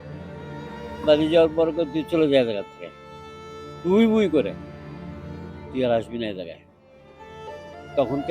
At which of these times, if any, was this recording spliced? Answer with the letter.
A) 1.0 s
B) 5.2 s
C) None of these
C